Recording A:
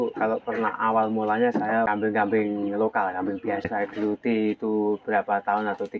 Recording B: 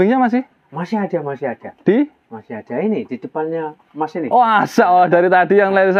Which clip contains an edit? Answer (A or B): A